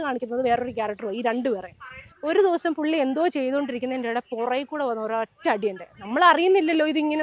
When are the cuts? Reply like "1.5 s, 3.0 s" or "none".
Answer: none